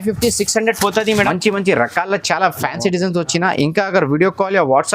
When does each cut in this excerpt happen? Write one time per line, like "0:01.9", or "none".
0:01.3